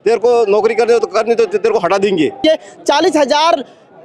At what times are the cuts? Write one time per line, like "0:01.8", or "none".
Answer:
0:02.4